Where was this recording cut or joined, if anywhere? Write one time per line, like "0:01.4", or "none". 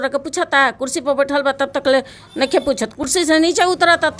none